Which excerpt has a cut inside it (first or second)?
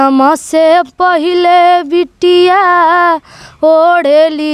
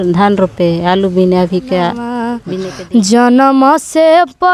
second